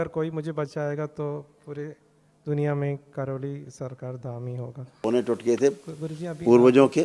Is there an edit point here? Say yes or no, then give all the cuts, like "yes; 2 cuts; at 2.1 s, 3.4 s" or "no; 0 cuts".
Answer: yes; 1 cut; at 4.9 s